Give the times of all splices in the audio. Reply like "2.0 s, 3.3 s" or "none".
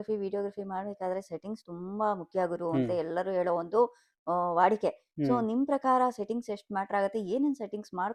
none